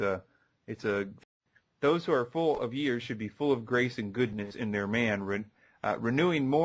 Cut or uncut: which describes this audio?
uncut